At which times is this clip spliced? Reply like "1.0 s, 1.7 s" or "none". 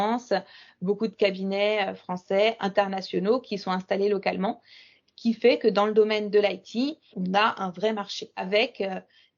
7.1 s, 8.5 s